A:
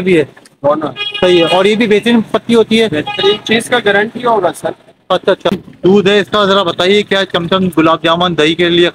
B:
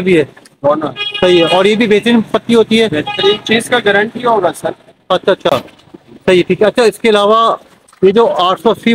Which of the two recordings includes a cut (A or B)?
A